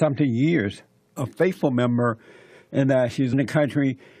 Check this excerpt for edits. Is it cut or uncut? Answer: uncut